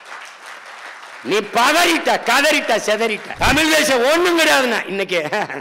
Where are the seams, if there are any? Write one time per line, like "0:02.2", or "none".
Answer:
0:03.3

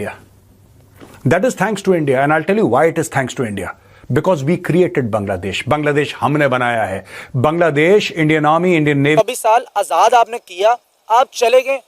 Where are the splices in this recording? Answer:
0:09.2

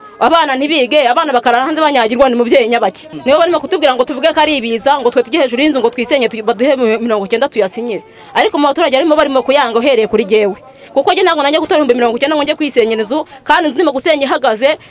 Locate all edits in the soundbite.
0:03.1

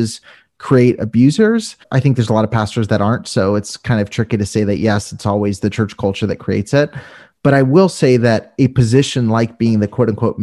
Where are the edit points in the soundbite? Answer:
0:01.8

